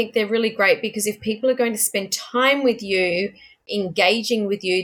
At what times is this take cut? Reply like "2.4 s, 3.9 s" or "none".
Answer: 3.7 s